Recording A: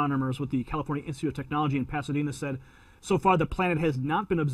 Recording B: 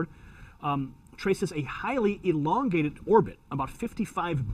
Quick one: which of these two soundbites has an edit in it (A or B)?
A